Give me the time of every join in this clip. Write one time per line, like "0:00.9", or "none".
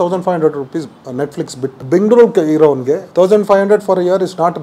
0:01.8
0:03.0